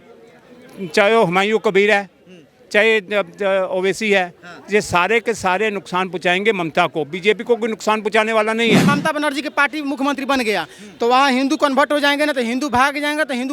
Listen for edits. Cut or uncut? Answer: cut